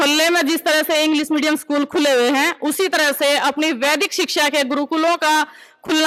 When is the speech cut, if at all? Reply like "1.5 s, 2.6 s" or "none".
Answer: none